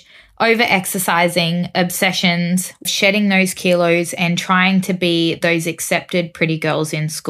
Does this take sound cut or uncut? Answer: cut